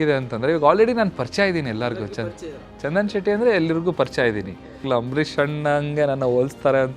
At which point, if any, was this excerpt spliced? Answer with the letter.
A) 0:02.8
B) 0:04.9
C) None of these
B